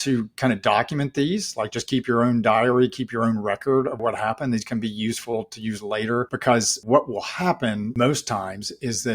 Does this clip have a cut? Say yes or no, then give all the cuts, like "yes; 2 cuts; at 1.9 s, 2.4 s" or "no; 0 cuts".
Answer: yes; 3 cuts; at 4.0 s, 6.8 s, 7.9 s